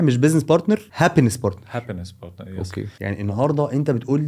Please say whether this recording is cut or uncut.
cut